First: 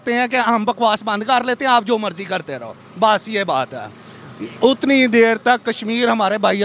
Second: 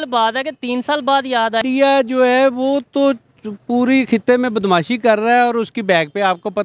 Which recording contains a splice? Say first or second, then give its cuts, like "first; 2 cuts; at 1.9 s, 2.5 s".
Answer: second; 1 cut; at 1.6 s